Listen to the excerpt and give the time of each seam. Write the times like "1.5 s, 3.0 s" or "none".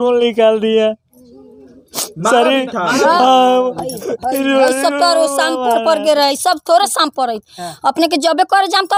none